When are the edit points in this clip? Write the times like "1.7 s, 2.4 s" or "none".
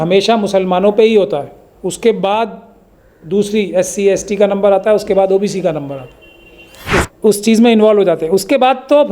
7.1 s